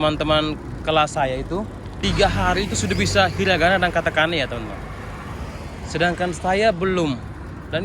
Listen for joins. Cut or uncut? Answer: cut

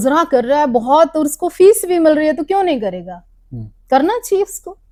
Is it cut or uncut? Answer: uncut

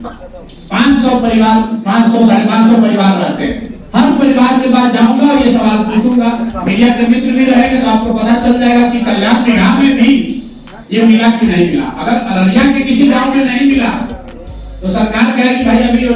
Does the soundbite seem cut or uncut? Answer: uncut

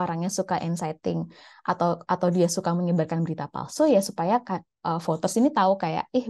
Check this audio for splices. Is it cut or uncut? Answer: uncut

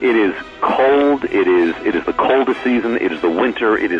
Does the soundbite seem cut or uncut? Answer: uncut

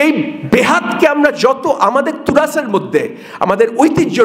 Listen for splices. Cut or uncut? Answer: uncut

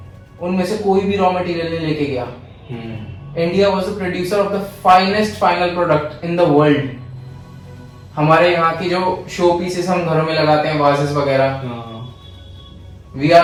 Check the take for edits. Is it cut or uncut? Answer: uncut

